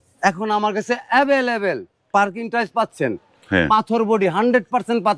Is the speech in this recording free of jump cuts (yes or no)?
yes